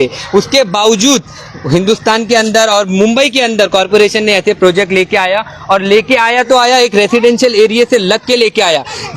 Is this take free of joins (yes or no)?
yes